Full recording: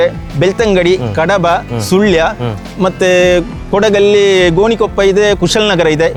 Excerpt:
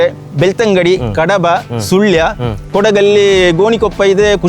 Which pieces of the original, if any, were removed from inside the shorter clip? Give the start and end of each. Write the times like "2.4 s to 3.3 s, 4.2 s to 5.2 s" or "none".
2.6 s to 3.6 s